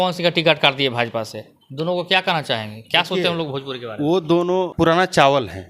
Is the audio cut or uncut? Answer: cut